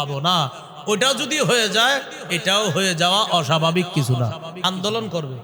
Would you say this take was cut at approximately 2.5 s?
no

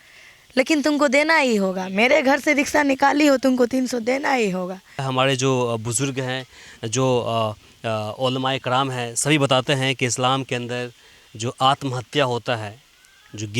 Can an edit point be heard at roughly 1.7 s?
no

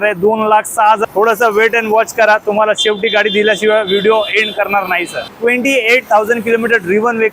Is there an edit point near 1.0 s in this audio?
yes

